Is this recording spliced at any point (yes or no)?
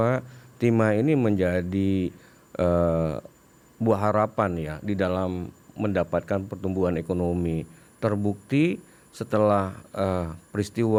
no